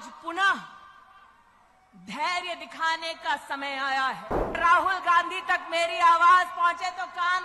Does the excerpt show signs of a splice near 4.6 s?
yes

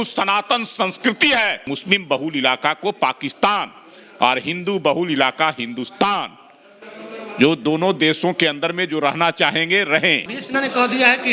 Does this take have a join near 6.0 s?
no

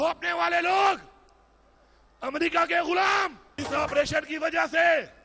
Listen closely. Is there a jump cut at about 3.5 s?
yes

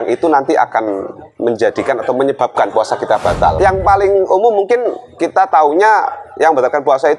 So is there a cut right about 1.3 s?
no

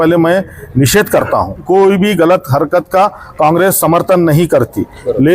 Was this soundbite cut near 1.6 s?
yes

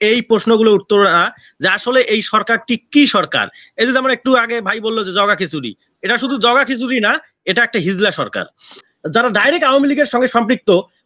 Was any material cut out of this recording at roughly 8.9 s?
yes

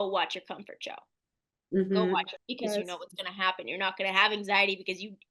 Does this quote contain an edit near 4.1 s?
no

